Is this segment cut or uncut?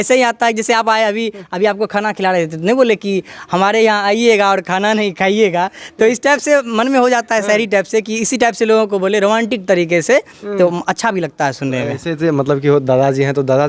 uncut